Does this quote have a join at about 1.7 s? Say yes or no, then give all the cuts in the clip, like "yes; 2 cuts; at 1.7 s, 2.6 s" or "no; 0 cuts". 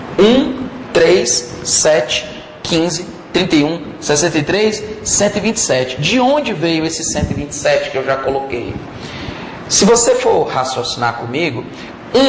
no; 0 cuts